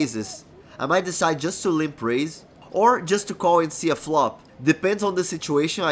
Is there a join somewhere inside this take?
no; 0 cuts

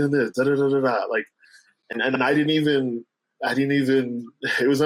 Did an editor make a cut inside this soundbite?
no; 0 cuts

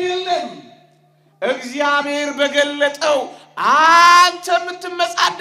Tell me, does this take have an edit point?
no; 0 cuts

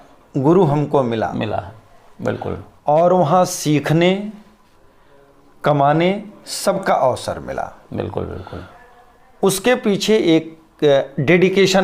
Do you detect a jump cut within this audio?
no; 0 cuts

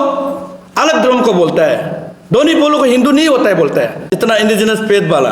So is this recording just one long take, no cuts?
no; 1 cut; at 4.1 s

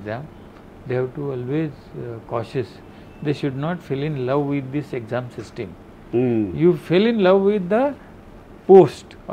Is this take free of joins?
yes; 0 cuts

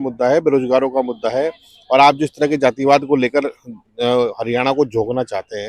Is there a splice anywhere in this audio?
no; 0 cuts

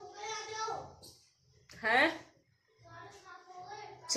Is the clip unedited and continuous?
yes; 0 cuts

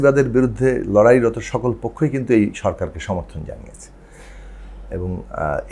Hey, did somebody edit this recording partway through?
no; 0 cuts

